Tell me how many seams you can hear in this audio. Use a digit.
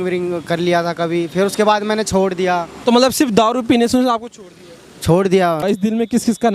2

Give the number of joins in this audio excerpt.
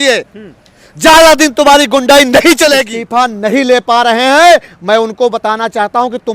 1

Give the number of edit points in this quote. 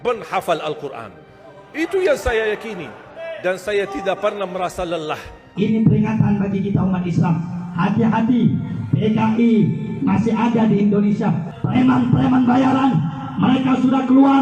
2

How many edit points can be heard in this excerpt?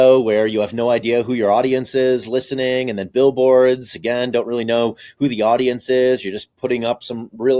0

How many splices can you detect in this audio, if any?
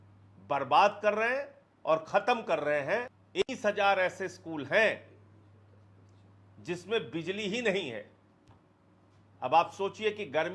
1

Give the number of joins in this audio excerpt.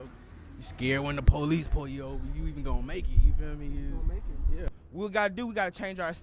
1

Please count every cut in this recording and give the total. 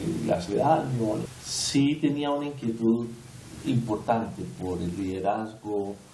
1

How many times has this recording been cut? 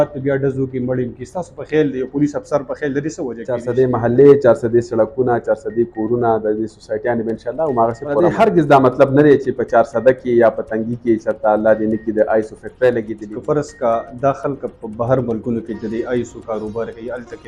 3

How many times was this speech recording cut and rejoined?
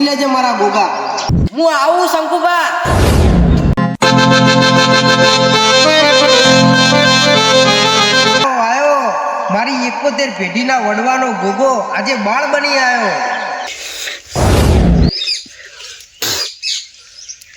2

